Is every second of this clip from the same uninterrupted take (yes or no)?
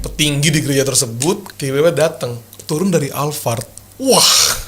no